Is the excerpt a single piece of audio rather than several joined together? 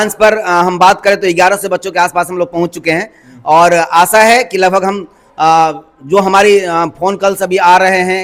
yes; 0 cuts

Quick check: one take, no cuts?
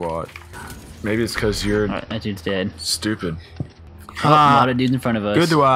yes; 0 cuts

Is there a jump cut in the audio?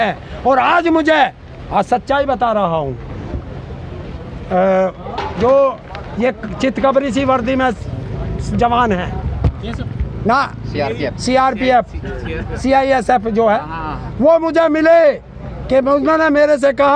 no; 0 cuts

